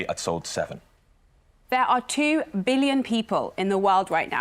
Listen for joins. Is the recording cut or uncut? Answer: cut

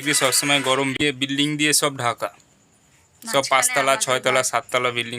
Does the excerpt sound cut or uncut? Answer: cut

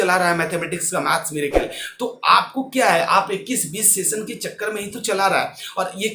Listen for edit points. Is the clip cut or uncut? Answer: uncut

